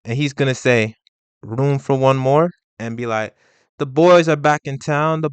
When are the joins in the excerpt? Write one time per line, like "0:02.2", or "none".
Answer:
0:02.7

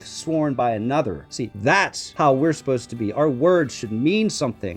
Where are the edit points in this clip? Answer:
0:01.8

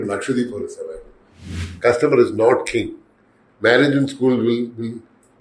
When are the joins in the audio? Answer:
0:01.7

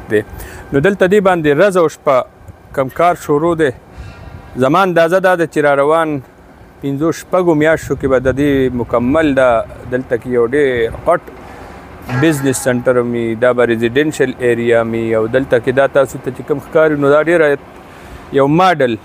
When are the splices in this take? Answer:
none

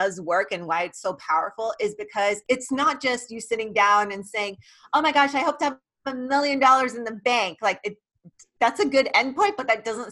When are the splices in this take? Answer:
0:02.4

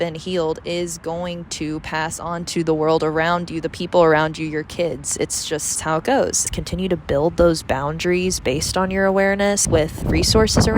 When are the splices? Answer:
0:06.4

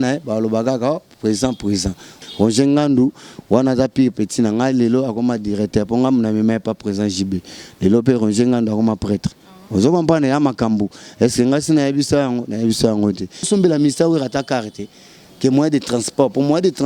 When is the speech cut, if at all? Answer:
0:02.1
0:13.5

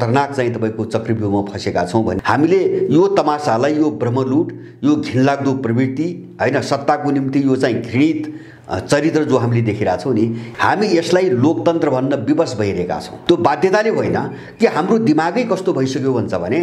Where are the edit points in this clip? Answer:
0:02.2
0:10.4
0:13.1

